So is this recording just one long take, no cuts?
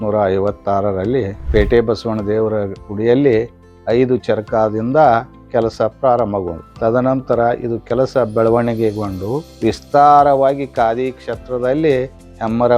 no; 3 cuts; at 1.4 s, 6.6 s, 9.5 s

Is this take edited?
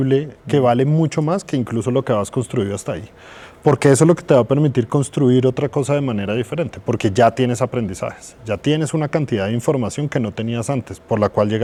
no; 0 cuts

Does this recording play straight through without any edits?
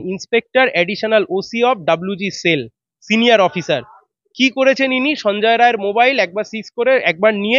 yes; 0 cuts

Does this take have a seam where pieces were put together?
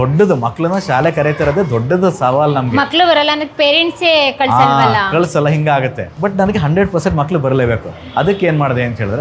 no; 0 cuts

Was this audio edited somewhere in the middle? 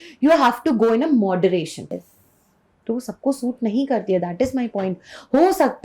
yes; 1 cut; at 2.1 s

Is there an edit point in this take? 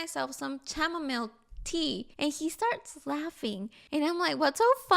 yes; 2 cuts; at 2.1 s, 3.7 s

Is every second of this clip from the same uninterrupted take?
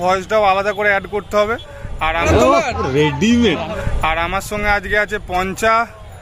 no; 2 cuts; at 2.2 s, 3.8 s

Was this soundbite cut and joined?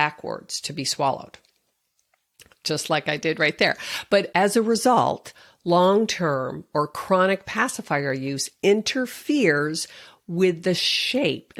no; 0 cuts

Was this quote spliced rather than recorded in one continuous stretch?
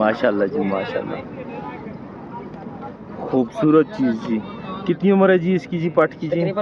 no; 0 cuts

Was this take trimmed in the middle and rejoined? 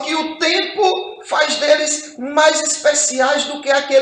no; 0 cuts

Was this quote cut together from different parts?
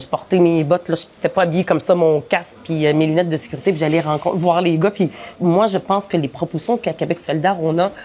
yes; 1 cut; at 5.2 s

